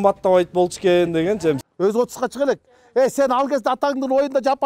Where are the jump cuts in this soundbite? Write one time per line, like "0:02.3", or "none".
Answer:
0:01.7